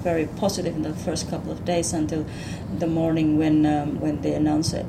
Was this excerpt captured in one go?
yes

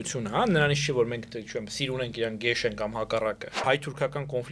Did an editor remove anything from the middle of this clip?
yes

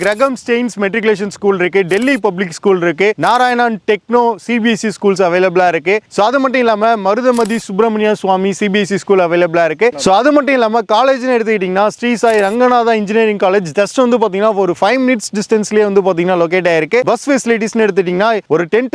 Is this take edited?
no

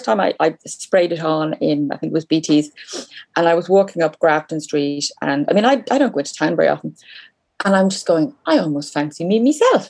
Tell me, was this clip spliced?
no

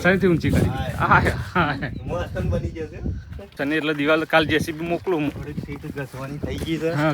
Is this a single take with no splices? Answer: no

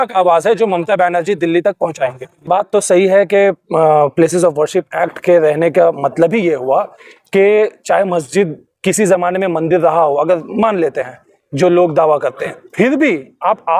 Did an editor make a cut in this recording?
no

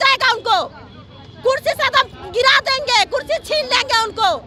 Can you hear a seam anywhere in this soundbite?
no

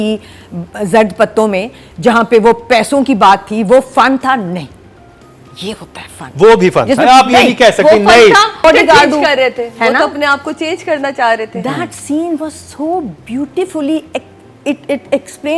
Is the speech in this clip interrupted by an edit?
yes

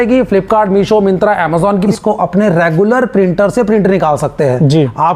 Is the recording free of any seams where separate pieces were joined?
no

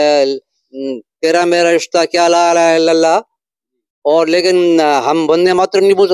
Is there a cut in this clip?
no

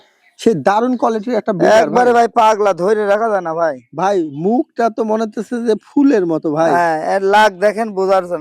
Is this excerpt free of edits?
yes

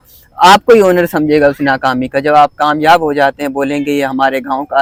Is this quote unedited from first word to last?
yes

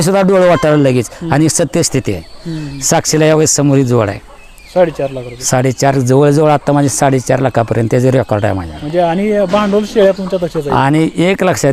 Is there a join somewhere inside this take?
no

